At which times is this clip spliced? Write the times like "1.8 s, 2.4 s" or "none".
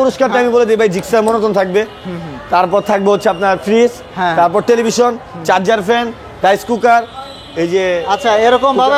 none